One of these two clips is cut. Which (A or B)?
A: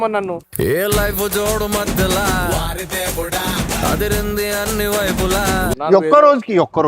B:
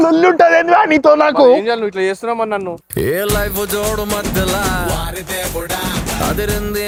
A